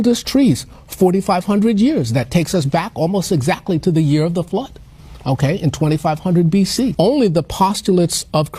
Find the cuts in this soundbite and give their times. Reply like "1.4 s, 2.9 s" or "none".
6.9 s